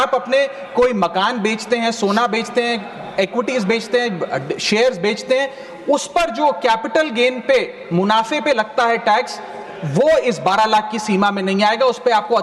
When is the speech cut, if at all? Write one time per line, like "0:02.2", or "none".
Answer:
none